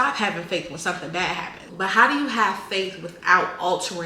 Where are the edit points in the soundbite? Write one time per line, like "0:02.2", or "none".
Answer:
0:01.6